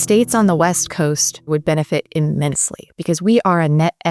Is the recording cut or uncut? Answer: cut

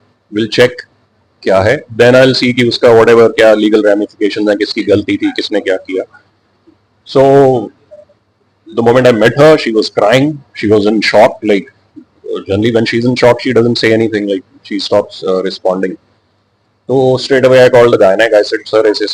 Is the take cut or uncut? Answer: uncut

